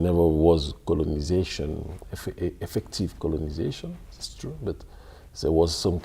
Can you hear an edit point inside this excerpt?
no; 0 cuts

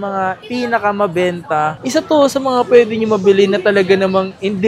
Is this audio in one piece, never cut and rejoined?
no; 1 cut; at 1.8 s

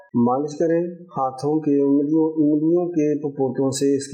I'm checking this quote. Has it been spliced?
no; 0 cuts

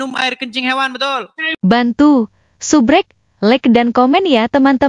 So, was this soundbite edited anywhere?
yes; 1 cut; at 1.5 s

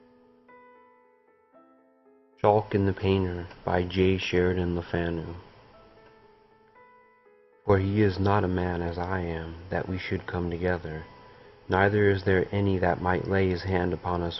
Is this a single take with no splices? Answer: yes; 0 cuts

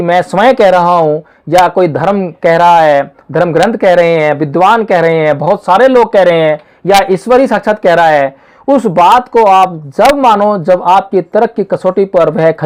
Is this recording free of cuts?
yes; 0 cuts

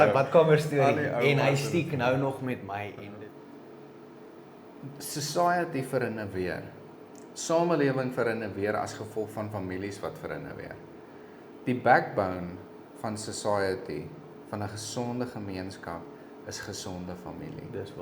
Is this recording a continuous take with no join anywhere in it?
no; 1 cut; at 3.0 s

